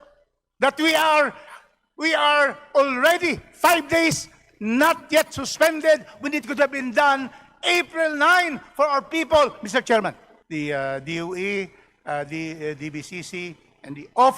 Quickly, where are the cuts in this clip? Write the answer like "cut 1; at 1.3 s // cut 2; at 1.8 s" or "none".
cut 1; at 10.3 s